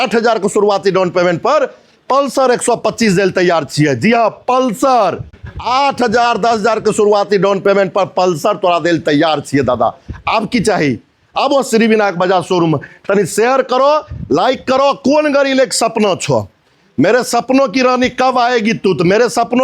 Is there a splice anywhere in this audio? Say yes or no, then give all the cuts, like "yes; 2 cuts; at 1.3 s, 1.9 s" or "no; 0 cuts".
no; 0 cuts